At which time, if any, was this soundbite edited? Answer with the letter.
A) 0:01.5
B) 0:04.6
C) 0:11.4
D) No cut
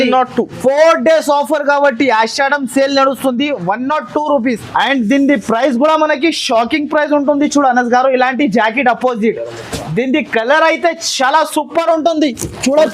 B